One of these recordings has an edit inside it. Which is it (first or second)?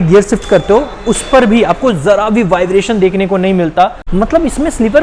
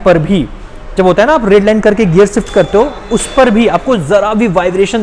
first